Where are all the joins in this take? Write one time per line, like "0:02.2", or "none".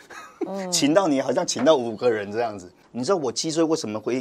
0:02.7